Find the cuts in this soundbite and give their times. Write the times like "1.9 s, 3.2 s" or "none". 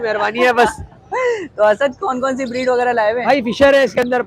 none